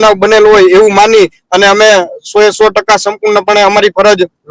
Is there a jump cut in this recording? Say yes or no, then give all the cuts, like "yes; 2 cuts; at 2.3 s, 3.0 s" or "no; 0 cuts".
no; 0 cuts